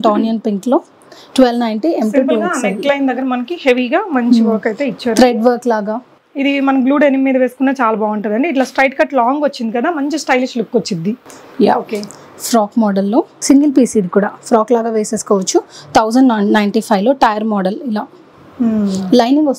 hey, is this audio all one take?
yes; 0 cuts

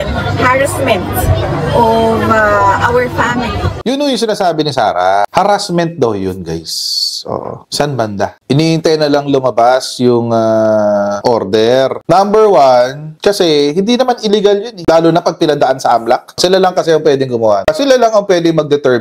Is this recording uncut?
no; 1 cut; at 3.7 s

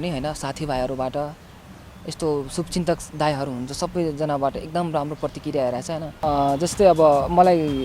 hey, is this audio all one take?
no; 1 cut; at 6.2 s

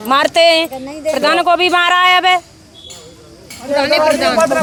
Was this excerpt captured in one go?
yes; 0 cuts

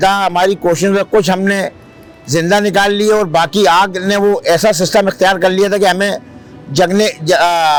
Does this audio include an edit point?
no; 0 cuts

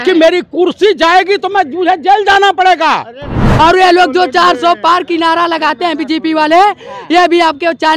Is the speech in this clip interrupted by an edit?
yes; 1 cut; at 3.4 s

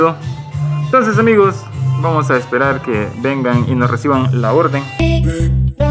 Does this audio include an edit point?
yes; 1 cut; at 4.9 s

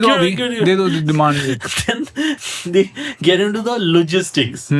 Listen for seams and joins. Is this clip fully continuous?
yes; 0 cuts

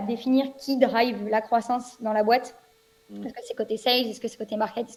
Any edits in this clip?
no; 0 cuts

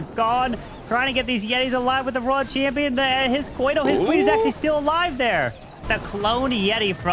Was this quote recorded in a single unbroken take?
no; 1 cut; at 5.9 s

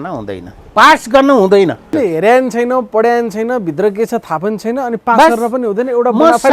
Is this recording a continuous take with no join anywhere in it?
no; 1 cut; at 1.9 s

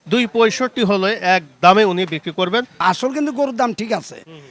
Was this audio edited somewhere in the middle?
yes; 1 cut; at 2.8 s

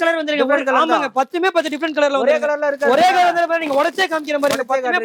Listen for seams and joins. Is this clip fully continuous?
yes; 0 cuts

